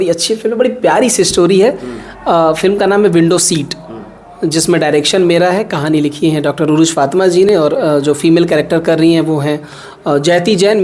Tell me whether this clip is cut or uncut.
uncut